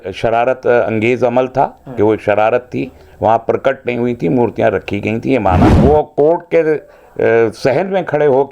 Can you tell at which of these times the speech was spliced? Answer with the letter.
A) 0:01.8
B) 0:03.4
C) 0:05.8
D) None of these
C